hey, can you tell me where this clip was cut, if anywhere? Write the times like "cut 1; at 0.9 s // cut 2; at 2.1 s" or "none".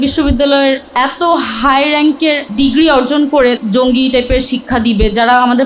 cut 1; at 0.9 s // cut 2; at 2.5 s // cut 3; at 3.6 s

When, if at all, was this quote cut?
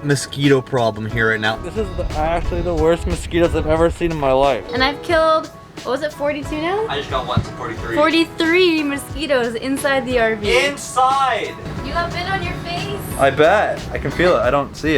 cut 1; at 1.6 s // cut 2; at 4.7 s // cut 3; at 11.7 s

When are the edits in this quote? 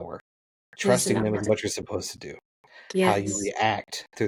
none

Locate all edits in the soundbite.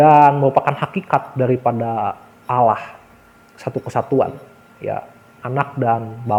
none

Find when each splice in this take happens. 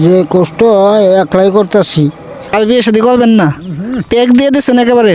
cut 1; at 2.5 s

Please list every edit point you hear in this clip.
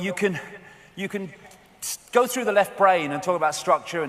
cut 1; at 2.7 s

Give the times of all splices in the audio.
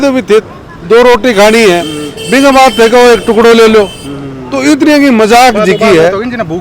none

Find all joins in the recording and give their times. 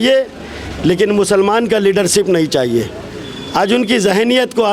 none

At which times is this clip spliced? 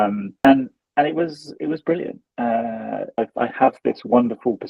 cut 1; at 3.2 s

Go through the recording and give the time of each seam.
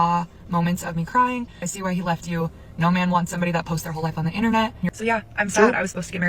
cut 1; at 1.6 s // cut 2; at 4.9 s

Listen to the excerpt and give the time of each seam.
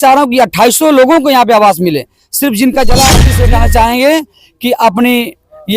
cut 1; at 3.3 s

